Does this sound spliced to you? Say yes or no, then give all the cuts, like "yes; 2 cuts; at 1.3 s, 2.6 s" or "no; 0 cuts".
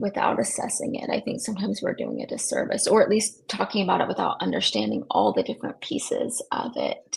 no; 0 cuts